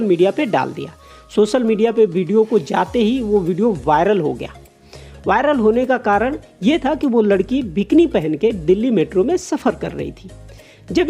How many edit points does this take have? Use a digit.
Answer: 0